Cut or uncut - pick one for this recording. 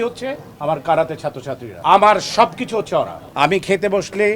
cut